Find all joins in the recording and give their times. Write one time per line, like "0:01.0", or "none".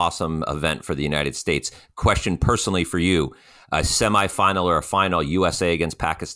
none